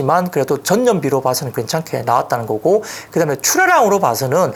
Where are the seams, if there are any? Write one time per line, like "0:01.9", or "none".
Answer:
none

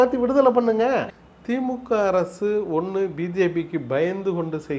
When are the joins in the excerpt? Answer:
0:01.2

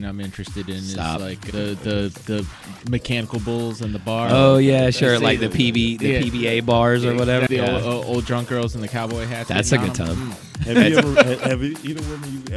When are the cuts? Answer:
0:07.5
0:10.5

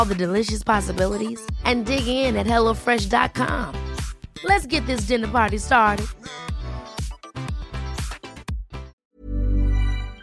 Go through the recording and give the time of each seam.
0:09.0

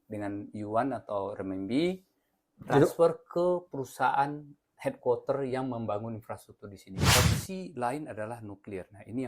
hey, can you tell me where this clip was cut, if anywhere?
0:07.2

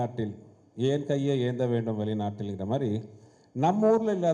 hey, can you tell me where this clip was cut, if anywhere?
none

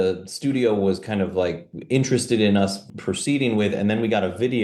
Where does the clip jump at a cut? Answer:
none

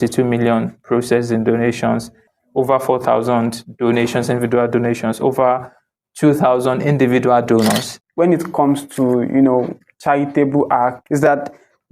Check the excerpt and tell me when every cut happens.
0:08.0
0:11.0

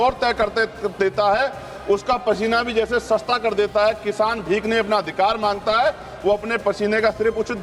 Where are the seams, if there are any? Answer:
none

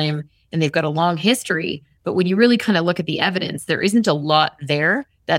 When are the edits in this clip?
none

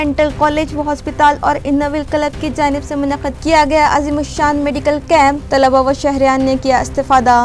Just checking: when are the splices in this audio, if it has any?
none

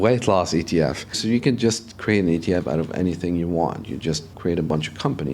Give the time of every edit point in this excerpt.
0:01.2
0:04.3

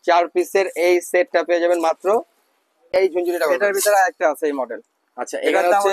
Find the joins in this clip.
0:02.9

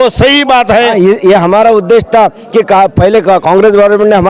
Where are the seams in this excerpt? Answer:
0:00.9

